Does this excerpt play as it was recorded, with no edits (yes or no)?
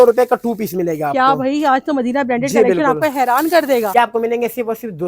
no